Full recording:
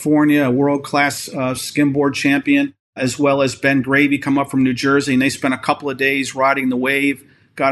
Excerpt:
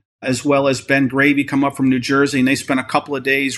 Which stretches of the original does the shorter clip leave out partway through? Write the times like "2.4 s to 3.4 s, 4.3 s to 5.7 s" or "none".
none